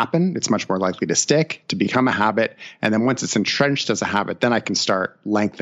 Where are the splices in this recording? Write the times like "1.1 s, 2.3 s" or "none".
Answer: none

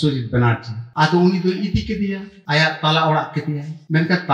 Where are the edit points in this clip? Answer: none

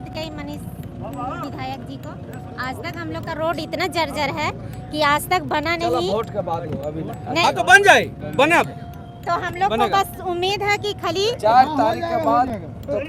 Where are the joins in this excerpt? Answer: none

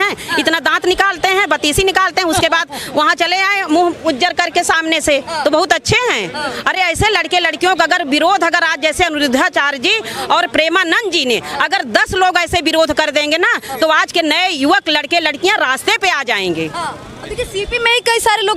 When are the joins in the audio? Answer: none

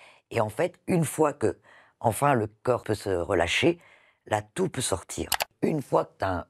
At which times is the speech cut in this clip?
2.8 s, 5.5 s

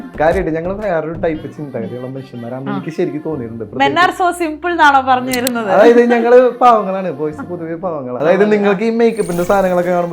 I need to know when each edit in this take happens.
8.1 s

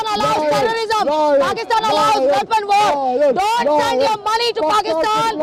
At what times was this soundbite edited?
none

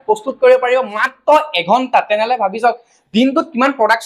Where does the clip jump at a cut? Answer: none

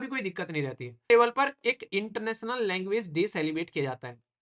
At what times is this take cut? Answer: 1.1 s

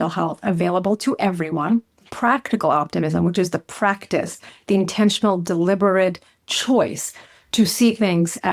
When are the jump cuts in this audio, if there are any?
2.1 s

